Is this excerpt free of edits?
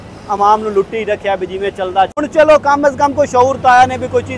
no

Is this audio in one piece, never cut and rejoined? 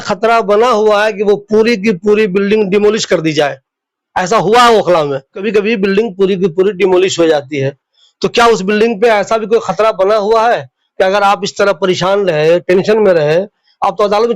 no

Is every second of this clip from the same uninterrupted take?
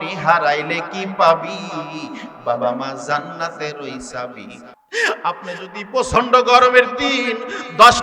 no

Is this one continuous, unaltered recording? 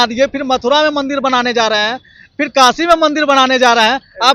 yes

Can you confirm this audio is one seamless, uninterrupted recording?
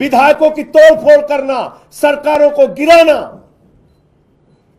yes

